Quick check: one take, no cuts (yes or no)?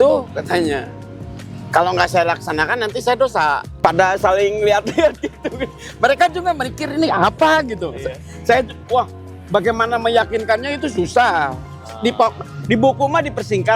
no